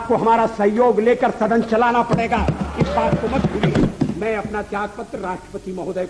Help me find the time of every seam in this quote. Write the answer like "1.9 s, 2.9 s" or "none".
3.8 s